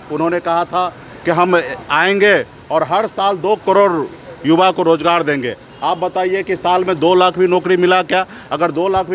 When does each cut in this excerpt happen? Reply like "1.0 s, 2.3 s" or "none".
none